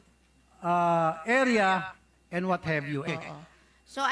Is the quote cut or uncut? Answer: cut